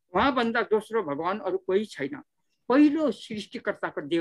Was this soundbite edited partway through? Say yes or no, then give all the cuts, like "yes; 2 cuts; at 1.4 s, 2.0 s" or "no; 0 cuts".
no; 0 cuts